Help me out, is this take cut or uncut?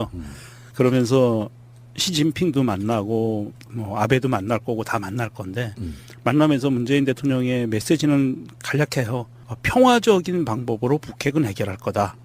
cut